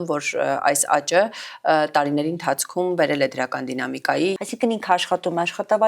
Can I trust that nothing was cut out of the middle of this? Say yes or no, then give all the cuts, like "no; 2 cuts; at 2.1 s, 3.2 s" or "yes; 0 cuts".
no; 1 cut; at 4.4 s